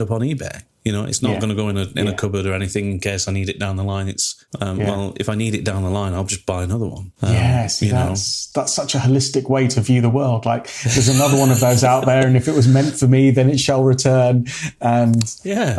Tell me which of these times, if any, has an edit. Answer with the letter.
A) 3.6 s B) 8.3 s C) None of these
B